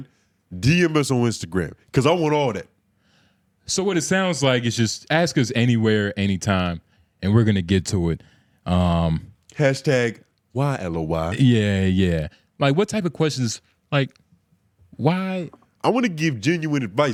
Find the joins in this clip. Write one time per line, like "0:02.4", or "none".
none